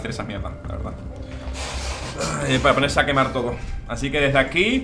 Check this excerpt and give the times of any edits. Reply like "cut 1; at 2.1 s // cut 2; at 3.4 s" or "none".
none